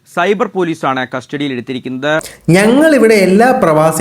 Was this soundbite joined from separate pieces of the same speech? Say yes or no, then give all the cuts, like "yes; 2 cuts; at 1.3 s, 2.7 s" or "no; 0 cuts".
yes; 1 cut; at 2.3 s